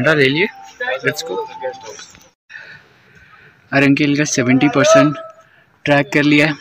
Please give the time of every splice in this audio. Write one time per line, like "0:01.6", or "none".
0:02.6

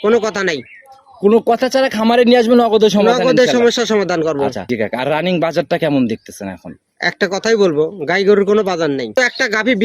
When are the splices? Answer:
0:04.6
0:09.1

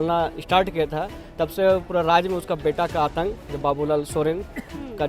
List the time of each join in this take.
none

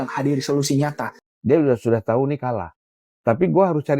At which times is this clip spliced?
0:01.1

